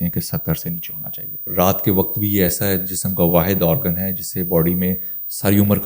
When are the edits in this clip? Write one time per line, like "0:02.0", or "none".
0:01.5